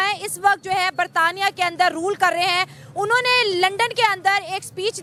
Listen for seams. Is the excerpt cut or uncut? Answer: uncut